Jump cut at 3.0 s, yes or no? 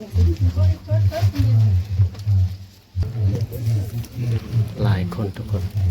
yes